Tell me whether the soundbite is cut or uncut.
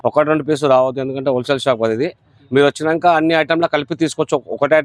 uncut